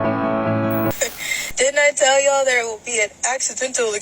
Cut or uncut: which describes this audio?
cut